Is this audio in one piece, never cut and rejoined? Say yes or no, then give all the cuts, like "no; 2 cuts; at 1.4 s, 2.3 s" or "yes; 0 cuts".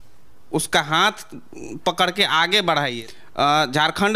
no; 1 cut; at 2.9 s